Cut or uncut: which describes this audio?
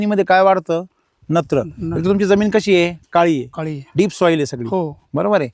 uncut